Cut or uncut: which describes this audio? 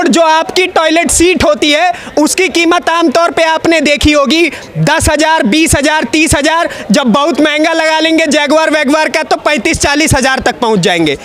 uncut